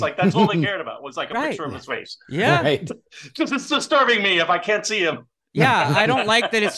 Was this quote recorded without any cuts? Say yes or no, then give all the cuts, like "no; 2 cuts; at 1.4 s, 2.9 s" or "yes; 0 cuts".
yes; 0 cuts